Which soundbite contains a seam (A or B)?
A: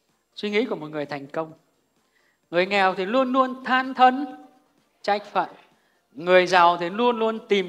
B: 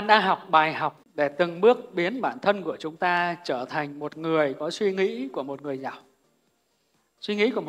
B